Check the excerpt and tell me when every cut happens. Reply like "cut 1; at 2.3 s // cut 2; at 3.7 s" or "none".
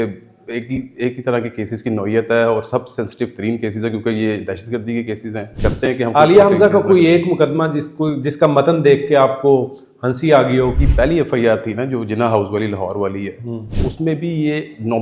cut 1; at 5.6 s // cut 2; at 10.8 s // cut 3; at 13.7 s